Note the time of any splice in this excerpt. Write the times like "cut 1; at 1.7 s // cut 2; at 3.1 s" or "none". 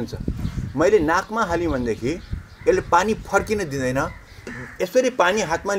cut 1; at 4.5 s